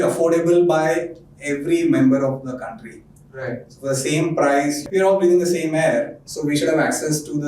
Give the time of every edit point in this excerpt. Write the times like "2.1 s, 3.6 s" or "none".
4.8 s